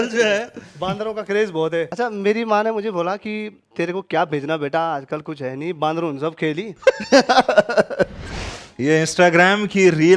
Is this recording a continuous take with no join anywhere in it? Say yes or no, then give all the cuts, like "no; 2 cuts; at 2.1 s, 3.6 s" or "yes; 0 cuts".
no; 2 cuts; at 1.9 s, 8.2 s